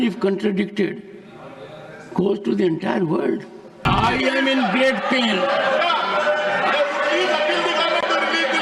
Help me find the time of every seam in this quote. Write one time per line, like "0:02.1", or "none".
0:03.9